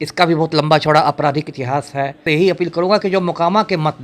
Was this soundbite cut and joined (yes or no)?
yes